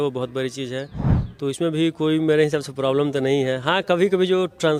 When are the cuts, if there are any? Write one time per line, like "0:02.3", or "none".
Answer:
none

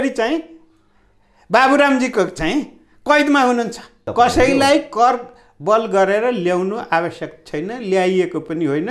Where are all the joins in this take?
0:04.0

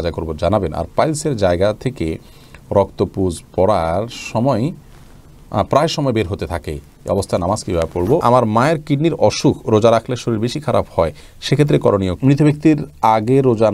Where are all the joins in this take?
0:08.2
0:12.1

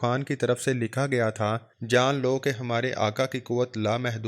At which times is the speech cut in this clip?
0:01.7

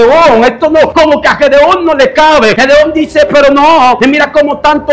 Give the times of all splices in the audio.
0:00.9
0:02.6
0:04.0

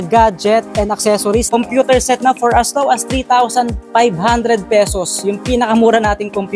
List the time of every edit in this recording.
0:01.5

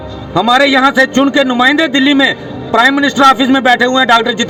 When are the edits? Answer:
none

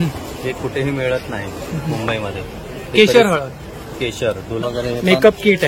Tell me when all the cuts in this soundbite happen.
0:04.6

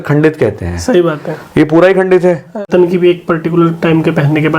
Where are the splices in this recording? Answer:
0:02.6

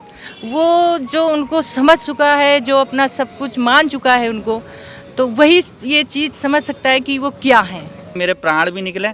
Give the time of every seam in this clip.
0:08.1

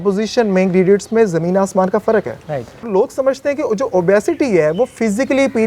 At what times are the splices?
0:02.9

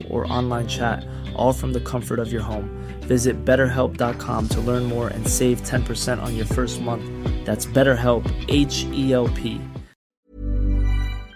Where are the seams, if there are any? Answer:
0:10.3

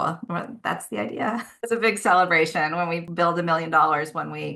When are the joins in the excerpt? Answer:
0:01.4

